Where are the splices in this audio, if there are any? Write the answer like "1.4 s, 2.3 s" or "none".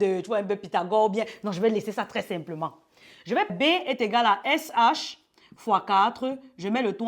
3.5 s